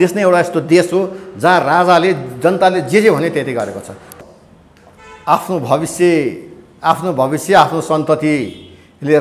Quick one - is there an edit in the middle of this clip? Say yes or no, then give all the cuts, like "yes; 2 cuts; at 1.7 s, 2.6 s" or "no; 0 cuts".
yes; 1 cut; at 4.1 s